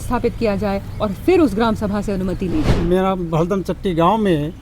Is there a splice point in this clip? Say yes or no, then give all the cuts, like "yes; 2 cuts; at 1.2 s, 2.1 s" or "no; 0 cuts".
yes; 1 cut; at 2.7 s